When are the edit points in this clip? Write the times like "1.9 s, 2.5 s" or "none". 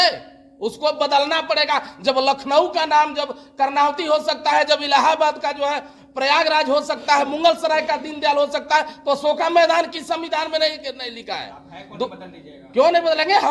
none